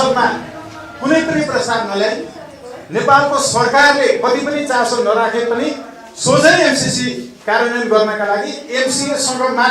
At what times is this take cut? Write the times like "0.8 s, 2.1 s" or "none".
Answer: none